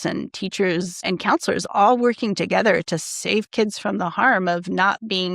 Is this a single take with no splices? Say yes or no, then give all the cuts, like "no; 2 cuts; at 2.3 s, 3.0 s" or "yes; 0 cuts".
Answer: no; 1 cut; at 1.0 s